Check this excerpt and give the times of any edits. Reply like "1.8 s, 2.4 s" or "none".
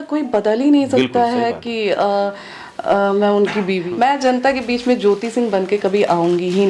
3.8 s